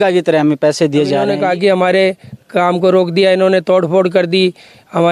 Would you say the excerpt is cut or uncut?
cut